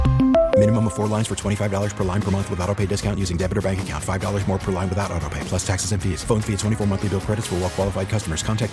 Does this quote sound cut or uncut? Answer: uncut